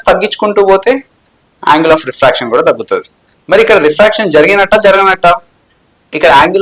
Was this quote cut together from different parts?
no; 0 cuts

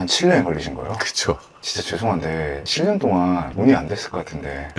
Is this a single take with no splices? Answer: yes; 0 cuts

